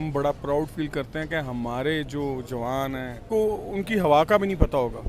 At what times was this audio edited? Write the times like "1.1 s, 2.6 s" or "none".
3.2 s